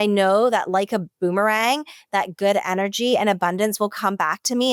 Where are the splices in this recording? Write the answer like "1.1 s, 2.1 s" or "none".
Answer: none